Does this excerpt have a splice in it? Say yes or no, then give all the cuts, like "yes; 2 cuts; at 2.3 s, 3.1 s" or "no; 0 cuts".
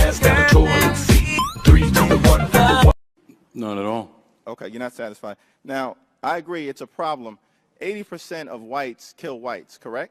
yes; 1 cut; at 6.4 s